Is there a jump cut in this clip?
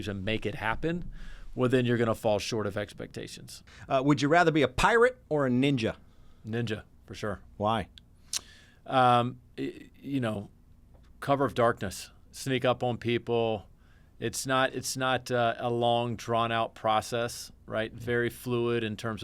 yes; 1 cut; at 3.7 s

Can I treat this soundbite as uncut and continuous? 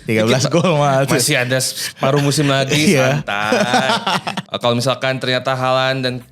no; 1 cut; at 4.3 s

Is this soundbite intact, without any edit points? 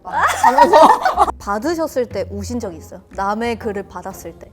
no; 1 cut; at 1.3 s

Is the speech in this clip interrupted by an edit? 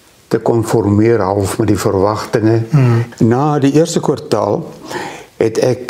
yes; 1 cut; at 3.1 s

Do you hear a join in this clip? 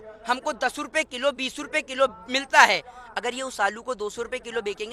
no; 0 cuts

